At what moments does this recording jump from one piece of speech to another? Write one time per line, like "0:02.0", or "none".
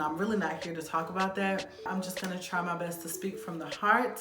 0:01.9